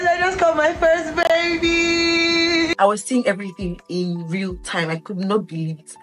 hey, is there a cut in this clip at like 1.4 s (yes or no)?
no